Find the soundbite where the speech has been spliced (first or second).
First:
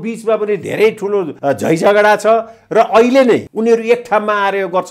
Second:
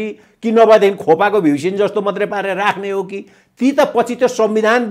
first